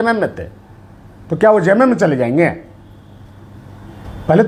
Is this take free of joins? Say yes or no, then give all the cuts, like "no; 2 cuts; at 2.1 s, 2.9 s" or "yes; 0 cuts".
yes; 0 cuts